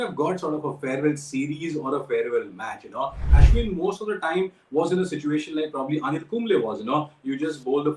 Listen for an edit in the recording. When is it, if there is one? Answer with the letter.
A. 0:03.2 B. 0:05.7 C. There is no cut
A